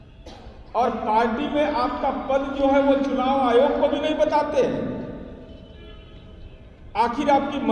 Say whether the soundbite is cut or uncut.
uncut